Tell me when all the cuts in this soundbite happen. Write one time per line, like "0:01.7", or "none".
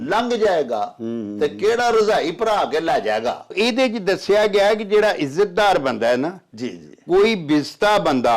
0:03.5